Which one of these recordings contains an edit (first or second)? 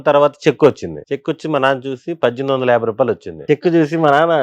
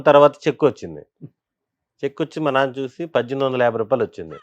first